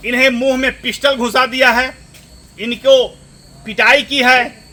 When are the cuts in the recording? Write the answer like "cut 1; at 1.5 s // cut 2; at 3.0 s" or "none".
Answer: none

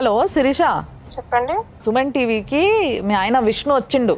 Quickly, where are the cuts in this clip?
none

